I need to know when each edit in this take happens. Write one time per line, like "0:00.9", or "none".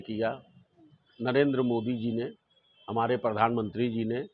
none